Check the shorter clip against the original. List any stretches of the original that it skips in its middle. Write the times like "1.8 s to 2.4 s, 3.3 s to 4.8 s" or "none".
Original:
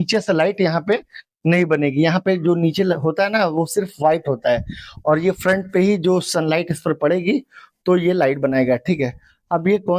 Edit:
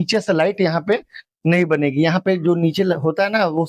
none